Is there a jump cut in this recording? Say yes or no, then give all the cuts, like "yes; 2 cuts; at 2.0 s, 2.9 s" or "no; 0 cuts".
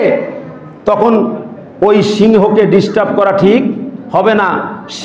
no; 0 cuts